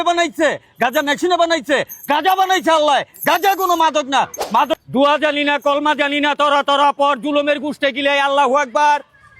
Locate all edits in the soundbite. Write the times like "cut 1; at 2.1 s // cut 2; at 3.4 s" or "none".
cut 1; at 4.7 s